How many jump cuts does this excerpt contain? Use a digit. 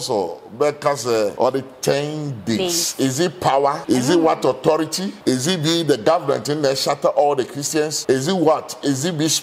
4